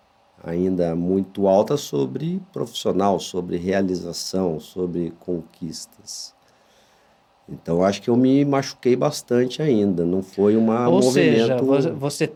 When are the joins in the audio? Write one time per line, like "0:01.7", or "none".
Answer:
none